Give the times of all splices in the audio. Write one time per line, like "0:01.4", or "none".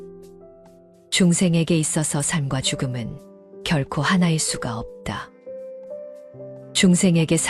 0:01.0